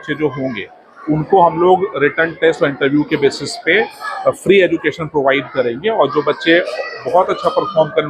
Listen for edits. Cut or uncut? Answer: uncut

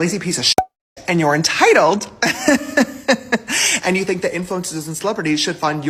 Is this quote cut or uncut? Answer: uncut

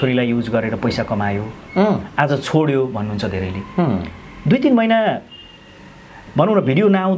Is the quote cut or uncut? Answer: uncut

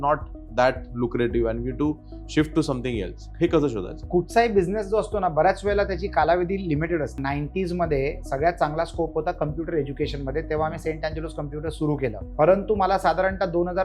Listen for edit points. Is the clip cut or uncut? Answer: cut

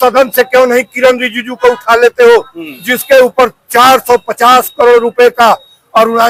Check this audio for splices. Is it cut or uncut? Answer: uncut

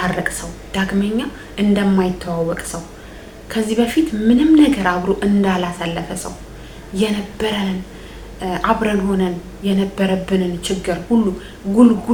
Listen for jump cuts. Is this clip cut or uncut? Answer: uncut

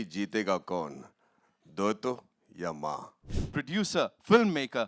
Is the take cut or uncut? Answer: cut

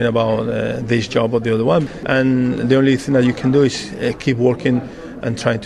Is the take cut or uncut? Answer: cut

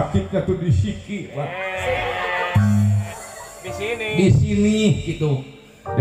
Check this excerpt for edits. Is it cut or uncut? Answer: uncut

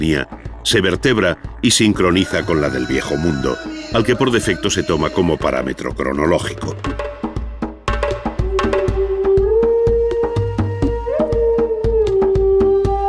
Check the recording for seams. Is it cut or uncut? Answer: cut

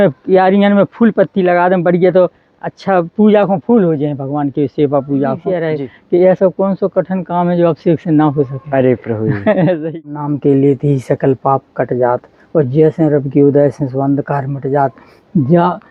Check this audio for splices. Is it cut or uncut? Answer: cut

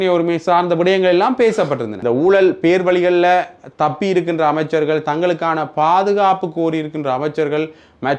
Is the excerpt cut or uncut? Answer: cut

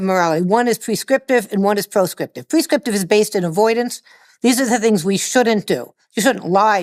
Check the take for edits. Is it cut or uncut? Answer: uncut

